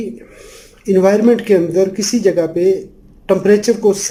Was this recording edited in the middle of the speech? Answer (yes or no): no